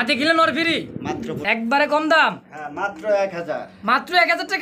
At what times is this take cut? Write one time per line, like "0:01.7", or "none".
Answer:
0:01.4